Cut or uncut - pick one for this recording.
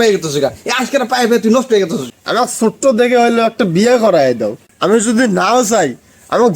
cut